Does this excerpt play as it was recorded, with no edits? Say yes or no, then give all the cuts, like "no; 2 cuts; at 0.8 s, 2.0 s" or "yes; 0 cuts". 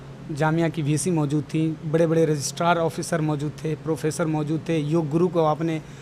yes; 0 cuts